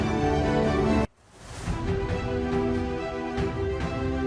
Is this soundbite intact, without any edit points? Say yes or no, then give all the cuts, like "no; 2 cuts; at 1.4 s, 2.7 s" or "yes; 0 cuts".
yes; 0 cuts